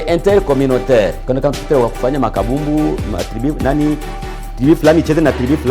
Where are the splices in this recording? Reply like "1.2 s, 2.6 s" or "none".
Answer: 1.2 s